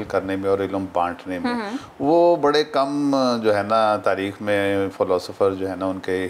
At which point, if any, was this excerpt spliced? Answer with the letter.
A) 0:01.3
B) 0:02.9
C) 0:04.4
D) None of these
D